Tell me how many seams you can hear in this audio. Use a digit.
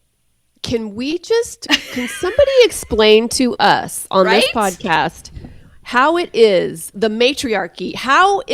1